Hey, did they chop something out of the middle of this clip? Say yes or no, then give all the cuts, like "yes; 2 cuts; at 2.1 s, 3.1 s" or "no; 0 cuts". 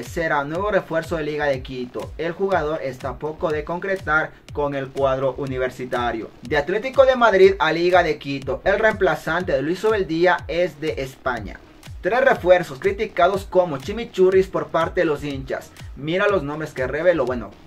yes; 2 cuts; at 6.3 s, 11.8 s